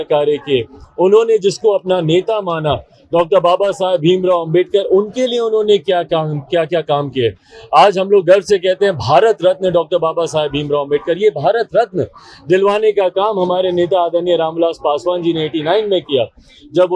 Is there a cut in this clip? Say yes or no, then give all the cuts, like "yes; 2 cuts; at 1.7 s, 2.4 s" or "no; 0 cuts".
no; 0 cuts